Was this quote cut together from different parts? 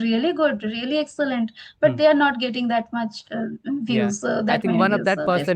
no; 0 cuts

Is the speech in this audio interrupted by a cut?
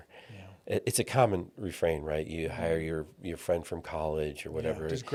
no; 0 cuts

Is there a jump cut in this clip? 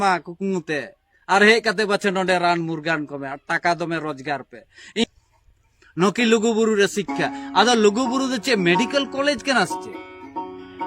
yes; 1 cut; at 5.0 s

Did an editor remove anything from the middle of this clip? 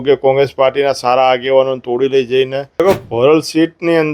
yes; 1 cut; at 2.6 s

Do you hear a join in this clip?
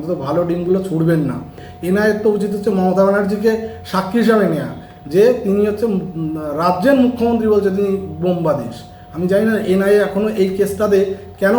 yes; 1 cut; at 1.7 s

